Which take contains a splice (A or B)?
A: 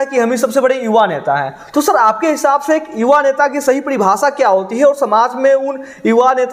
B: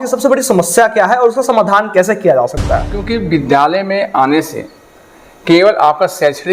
B